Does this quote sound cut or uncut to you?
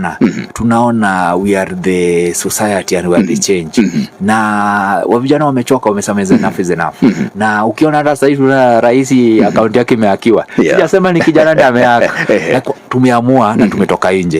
uncut